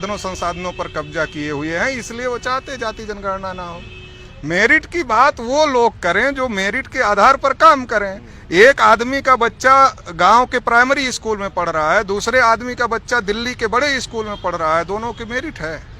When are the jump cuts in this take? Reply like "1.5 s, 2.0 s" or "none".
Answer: none